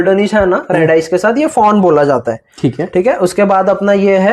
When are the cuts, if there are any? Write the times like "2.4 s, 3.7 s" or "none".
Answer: none